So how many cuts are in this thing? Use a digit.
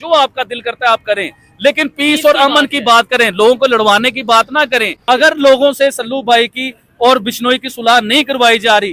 1